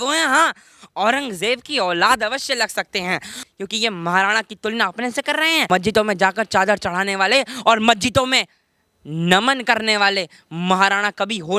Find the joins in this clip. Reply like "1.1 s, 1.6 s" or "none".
3.3 s, 5.7 s